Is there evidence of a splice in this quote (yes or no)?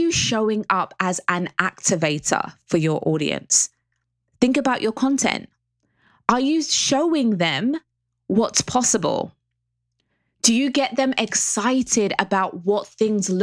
yes